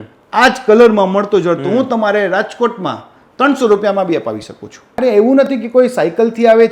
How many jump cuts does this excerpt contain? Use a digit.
1